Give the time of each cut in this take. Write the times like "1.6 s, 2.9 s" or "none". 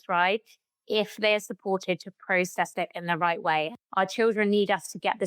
3.7 s